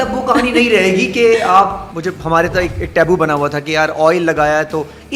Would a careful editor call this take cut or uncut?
uncut